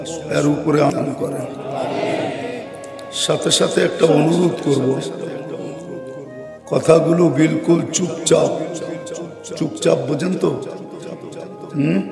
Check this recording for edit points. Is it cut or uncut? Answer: cut